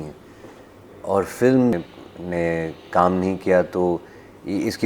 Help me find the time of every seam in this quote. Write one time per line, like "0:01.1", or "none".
0:01.8